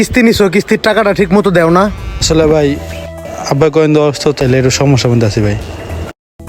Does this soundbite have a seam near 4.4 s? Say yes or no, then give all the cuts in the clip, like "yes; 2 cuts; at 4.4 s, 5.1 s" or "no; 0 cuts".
yes; 2 cuts; at 2.2 s, 4.4 s